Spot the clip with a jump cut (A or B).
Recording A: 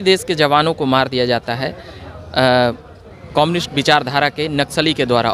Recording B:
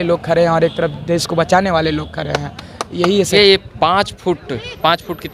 B